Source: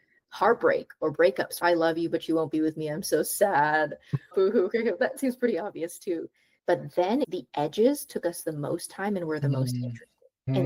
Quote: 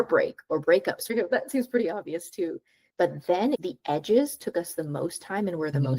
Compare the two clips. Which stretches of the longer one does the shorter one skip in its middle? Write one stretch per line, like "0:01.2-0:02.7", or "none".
0:01.6-0:04.8